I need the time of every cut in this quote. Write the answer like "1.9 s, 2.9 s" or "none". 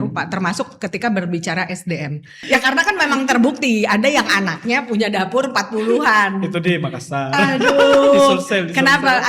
2.3 s

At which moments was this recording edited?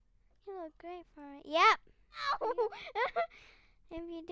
2.3 s

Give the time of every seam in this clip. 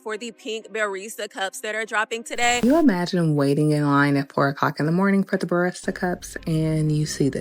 2.6 s

